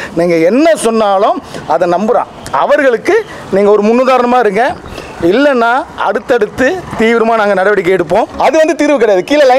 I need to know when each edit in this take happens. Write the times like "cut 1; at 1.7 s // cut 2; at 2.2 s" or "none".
cut 1; at 8.3 s